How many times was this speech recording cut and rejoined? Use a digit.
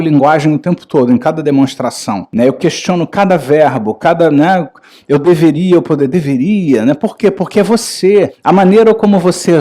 2